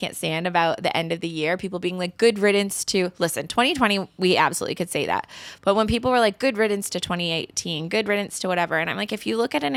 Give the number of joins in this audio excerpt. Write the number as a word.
zero